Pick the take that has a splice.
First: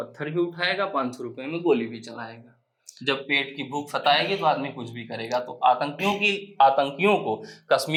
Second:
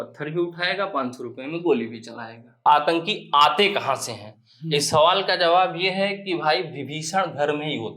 second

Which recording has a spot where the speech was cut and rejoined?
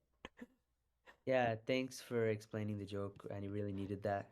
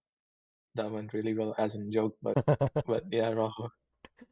second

